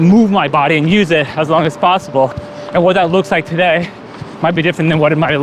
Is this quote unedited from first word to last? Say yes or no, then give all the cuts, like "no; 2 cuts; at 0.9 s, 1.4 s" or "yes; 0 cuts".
yes; 0 cuts